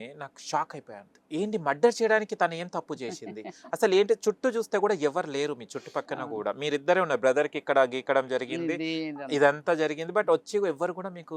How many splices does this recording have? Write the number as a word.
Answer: one